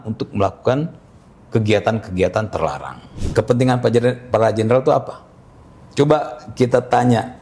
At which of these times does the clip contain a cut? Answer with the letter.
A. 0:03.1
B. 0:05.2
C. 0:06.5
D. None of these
A